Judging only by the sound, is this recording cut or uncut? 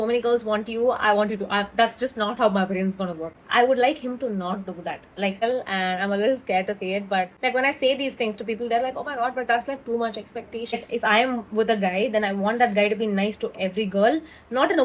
cut